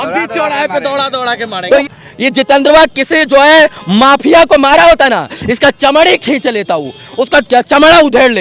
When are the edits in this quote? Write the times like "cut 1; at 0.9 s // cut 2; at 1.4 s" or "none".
cut 1; at 1.8 s